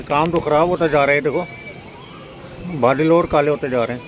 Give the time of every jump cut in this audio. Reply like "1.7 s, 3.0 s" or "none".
none

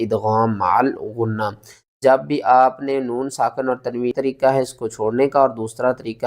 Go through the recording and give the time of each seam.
4.1 s

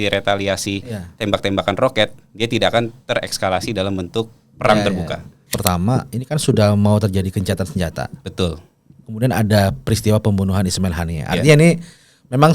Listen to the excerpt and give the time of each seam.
5.5 s

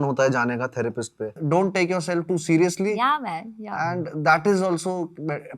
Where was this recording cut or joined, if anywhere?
1.4 s

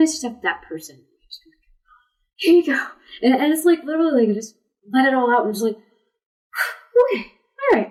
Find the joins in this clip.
none

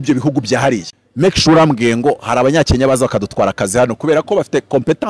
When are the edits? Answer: 1.0 s

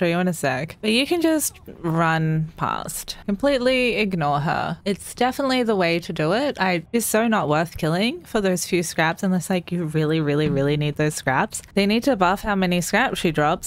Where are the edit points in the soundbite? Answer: none

